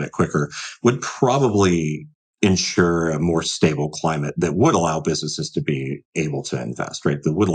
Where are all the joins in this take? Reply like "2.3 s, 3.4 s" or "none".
none